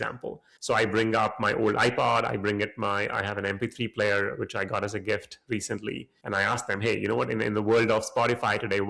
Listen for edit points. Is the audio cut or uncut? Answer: uncut